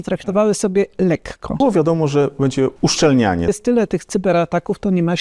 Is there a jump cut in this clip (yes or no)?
yes